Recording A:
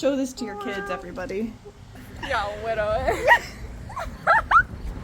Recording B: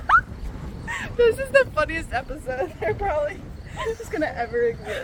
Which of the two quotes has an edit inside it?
A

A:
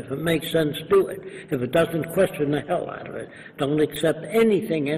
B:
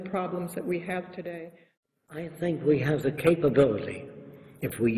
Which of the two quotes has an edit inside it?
B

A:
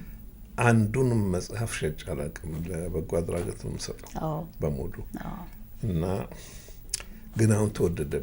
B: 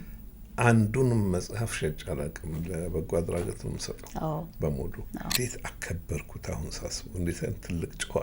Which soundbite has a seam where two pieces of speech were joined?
B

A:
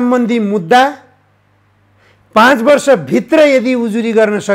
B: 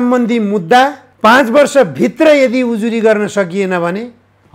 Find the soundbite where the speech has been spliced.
B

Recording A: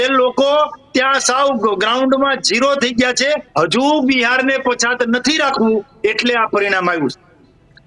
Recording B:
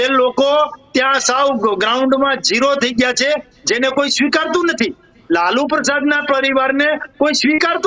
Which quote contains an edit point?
A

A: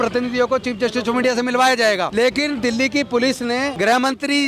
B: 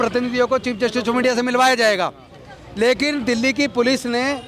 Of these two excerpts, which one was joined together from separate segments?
A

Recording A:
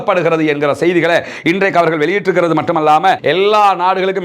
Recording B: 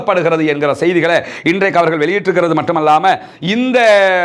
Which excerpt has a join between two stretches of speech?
A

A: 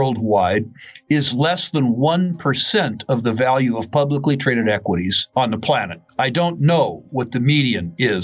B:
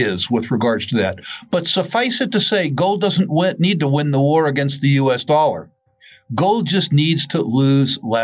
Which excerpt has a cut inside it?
A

